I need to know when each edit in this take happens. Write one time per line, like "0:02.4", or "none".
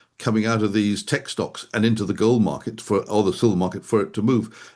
none